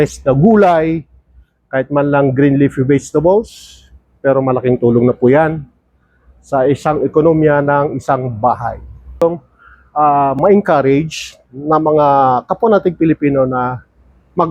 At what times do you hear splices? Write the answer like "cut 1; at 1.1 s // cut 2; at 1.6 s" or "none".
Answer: cut 1; at 9.2 s